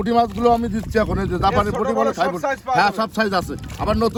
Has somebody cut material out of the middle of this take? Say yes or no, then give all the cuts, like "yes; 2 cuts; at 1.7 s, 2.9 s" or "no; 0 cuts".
no; 0 cuts